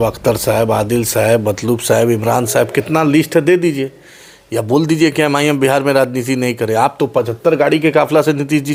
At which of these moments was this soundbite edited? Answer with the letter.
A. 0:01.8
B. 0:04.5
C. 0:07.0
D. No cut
D